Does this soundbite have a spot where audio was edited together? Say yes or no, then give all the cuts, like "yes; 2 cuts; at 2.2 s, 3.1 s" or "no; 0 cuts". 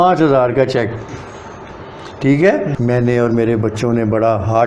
yes; 1 cut; at 2.7 s